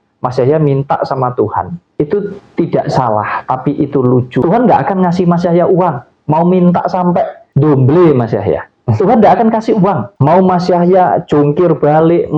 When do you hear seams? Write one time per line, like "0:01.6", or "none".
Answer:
0:01.8
0:04.4
0:07.4
0:10.1